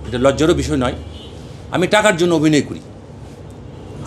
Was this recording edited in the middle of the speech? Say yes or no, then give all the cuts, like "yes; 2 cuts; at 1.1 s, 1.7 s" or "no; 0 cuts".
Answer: no; 0 cuts